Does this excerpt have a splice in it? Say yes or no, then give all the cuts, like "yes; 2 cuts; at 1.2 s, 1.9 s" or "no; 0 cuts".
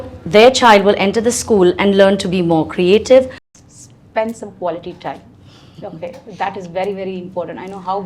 yes; 1 cut; at 3.4 s